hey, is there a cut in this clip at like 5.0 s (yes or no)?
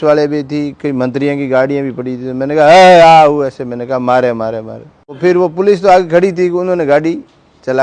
yes